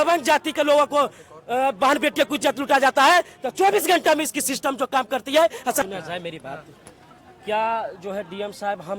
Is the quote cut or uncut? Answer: cut